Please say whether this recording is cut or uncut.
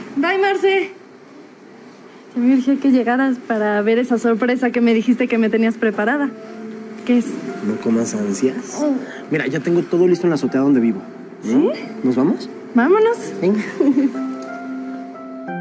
cut